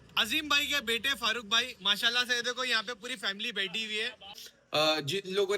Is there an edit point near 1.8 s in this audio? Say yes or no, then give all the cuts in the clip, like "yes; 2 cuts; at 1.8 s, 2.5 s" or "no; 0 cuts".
no; 1 cut; at 4.5 s